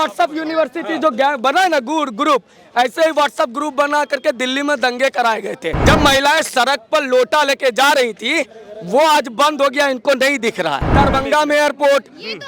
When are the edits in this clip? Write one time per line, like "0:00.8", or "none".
0:05.7
0:10.8